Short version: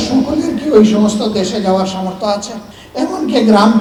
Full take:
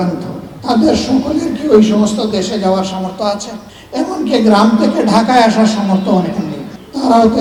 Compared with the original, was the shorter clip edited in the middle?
no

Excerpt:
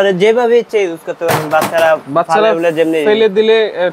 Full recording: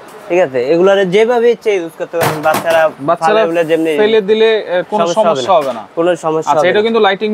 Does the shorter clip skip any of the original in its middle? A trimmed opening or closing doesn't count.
no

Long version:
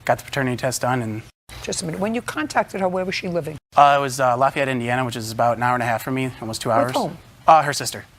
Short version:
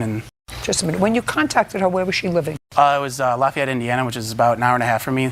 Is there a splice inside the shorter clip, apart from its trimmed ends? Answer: no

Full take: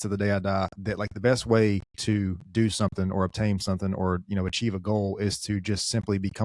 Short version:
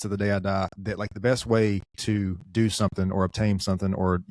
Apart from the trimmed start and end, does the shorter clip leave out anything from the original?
no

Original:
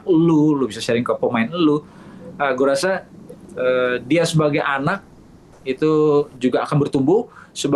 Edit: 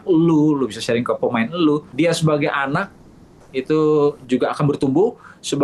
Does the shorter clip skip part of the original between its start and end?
yes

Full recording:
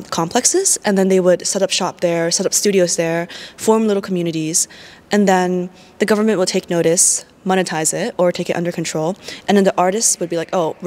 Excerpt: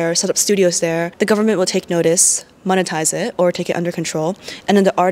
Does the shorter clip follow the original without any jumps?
no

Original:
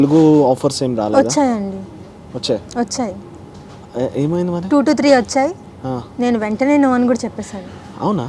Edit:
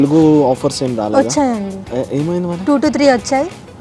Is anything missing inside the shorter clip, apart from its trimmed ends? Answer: yes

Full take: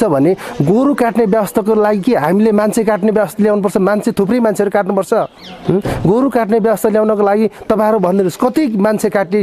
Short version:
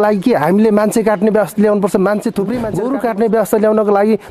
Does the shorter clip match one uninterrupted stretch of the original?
no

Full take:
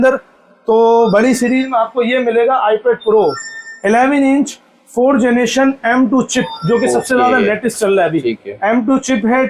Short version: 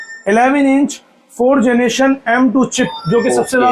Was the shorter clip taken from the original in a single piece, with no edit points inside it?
yes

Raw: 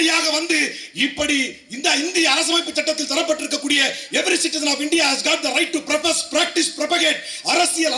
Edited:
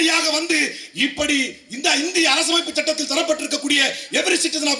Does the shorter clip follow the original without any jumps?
yes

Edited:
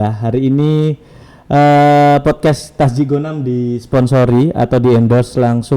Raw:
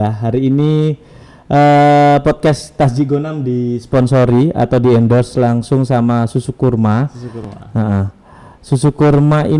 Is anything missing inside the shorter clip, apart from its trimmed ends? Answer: no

